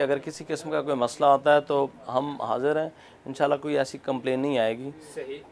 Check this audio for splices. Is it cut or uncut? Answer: uncut